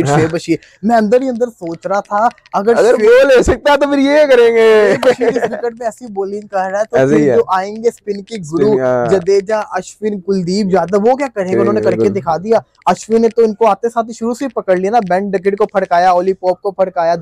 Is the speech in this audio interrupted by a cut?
no; 0 cuts

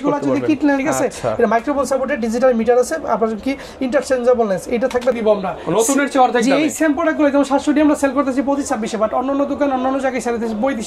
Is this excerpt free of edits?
no; 2 cuts; at 0.8 s, 5.1 s

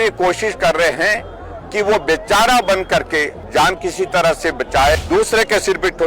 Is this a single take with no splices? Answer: no; 2 cuts; at 3.4 s, 4.9 s

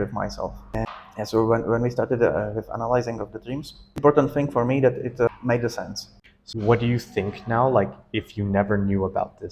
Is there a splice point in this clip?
yes; 3 cuts; at 0.9 s, 4.0 s, 5.7 s

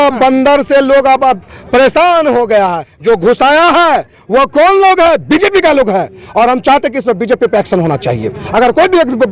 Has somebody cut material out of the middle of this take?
yes; 1 cut; at 2.9 s

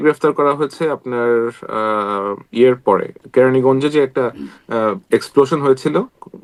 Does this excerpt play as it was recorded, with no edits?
yes; 0 cuts

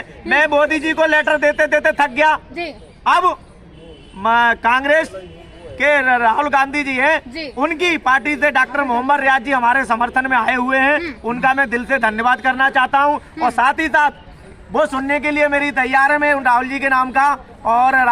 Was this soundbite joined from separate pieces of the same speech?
no; 0 cuts

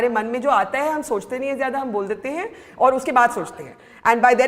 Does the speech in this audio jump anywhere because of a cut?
no; 0 cuts

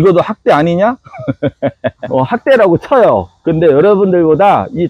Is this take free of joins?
no; 1 cut; at 2.0 s

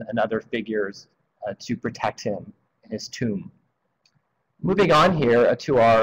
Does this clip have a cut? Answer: yes; 1 cut; at 3.1 s

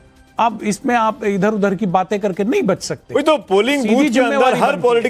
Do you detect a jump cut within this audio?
yes; 1 cut; at 2.5 s

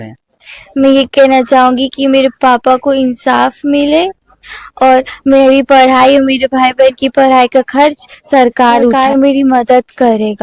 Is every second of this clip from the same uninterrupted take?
no; 1 cut; at 8.9 s

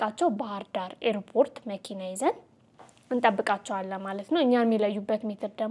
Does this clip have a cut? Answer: no; 0 cuts

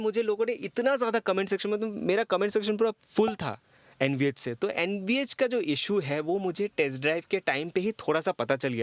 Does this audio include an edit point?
no; 0 cuts

